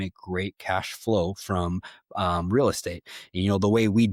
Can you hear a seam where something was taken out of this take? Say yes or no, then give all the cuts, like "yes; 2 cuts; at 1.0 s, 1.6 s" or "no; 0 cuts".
no; 0 cuts